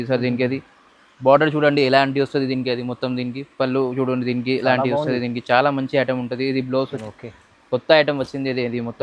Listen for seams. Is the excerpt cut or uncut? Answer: cut